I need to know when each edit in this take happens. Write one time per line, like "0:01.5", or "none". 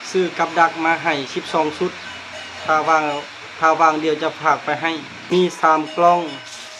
0:05.1